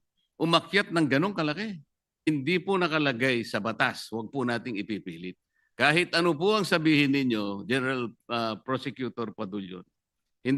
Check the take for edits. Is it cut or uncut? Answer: cut